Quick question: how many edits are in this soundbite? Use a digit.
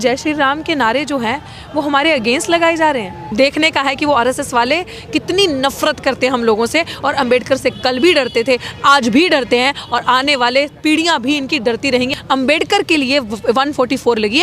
2